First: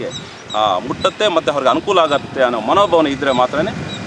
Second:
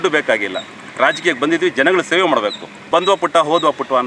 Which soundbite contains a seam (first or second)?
second